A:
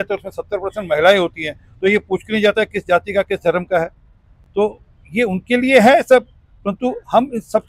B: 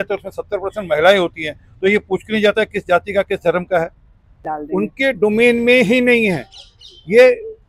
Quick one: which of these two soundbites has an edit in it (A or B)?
B